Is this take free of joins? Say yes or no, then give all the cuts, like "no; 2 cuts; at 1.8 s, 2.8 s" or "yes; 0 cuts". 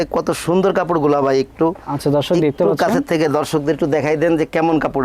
yes; 0 cuts